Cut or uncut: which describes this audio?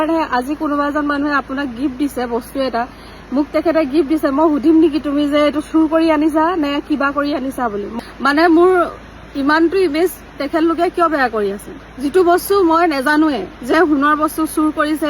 cut